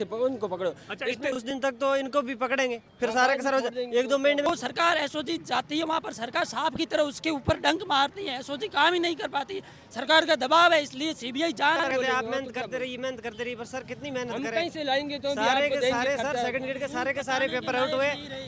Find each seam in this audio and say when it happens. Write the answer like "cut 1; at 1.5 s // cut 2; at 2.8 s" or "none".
cut 1; at 1.5 s // cut 2; at 4.5 s // cut 3; at 11.8 s